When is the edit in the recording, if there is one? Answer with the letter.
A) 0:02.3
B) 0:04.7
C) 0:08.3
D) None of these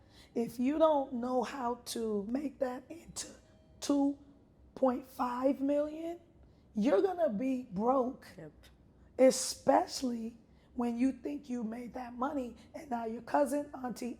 A